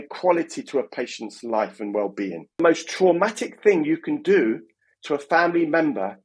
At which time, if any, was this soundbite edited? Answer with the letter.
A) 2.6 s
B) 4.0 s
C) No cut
A